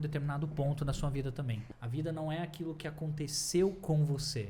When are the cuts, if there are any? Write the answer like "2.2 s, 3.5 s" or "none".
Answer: 1.6 s